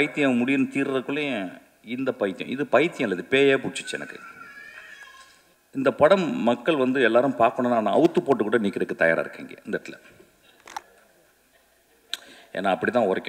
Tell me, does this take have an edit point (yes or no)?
yes